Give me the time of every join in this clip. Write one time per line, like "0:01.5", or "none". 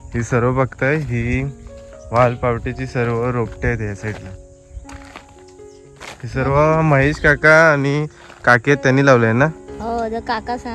none